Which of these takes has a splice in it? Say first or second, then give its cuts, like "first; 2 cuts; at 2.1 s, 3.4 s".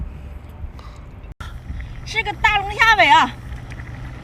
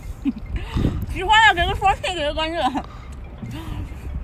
first; 1 cut; at 1.3 s